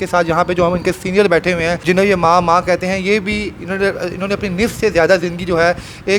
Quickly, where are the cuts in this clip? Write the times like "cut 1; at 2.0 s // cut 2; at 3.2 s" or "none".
cut 1; at 1.8 s